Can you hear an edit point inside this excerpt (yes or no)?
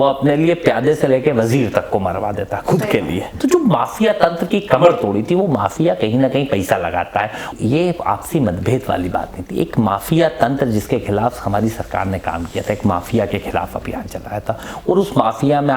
yes